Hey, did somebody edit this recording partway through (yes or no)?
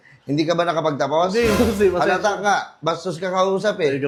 no